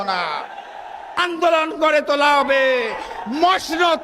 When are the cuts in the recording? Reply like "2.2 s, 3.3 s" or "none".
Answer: 1.2 s